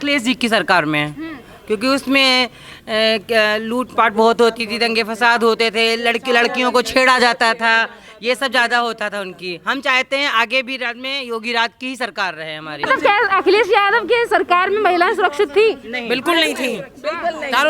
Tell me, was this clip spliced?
yes; 1 cut; at 12.8 s

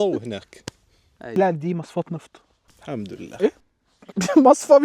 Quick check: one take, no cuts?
yes; 0 cuts

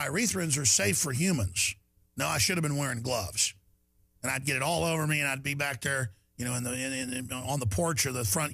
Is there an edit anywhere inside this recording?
no; 0 cuts

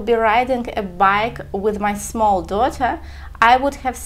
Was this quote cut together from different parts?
no; 0 cuts

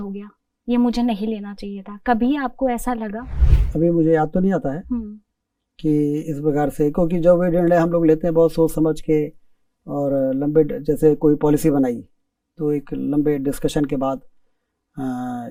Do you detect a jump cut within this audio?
no; 0 cuts

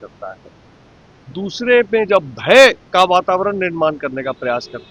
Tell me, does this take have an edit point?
yes; 1 cut; at 2.8 s

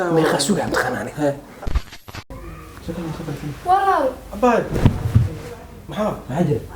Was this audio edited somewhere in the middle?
yes; 1 cut; at 1.9 s

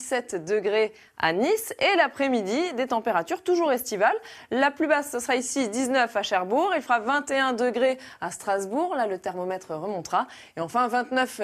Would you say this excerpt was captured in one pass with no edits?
yes; 0 cuts

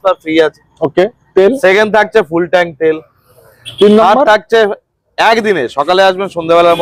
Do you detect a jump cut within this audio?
no; 0 cuts

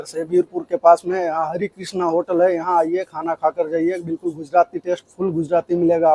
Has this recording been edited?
no; 0 cuts

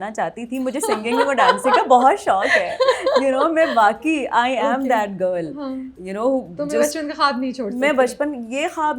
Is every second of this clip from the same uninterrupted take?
yes; 0 cuts

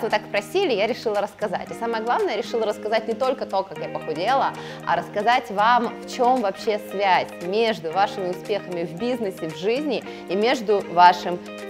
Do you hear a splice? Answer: no; 0 cuts

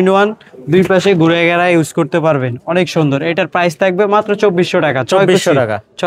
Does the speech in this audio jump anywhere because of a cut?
no; 0 cuts

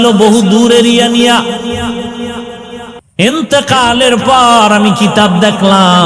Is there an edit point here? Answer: yes; 1 cut; at 3.0 s

